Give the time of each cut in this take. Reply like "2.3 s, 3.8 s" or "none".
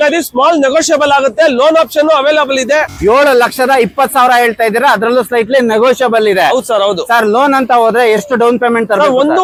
none